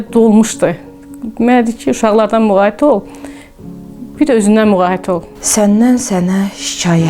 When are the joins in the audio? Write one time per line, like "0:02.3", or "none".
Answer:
0:05.3